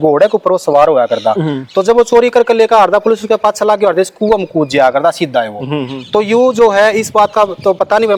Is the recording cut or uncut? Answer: uncut